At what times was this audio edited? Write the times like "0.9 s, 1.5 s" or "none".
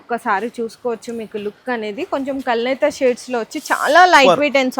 none